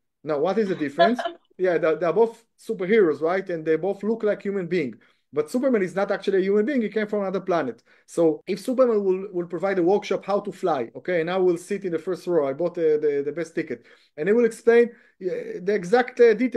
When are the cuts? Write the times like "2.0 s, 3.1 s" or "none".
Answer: 1.5 s, 8.4 s